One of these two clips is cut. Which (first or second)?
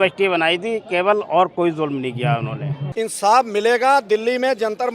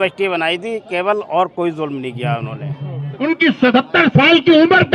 first